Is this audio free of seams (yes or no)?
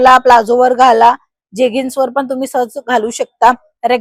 yes